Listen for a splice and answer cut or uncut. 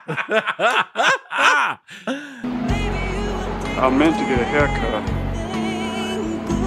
uncut